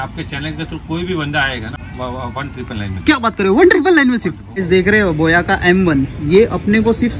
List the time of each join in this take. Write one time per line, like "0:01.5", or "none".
0:01.8
0:04.5